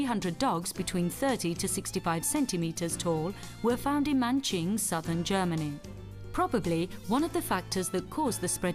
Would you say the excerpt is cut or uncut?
uncut